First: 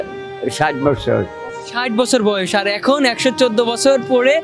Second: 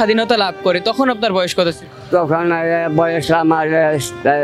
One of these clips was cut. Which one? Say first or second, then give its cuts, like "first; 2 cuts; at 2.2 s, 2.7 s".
second; 1 cut; at 1.9 s